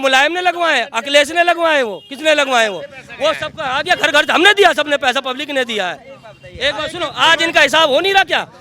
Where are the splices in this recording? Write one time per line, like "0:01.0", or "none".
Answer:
none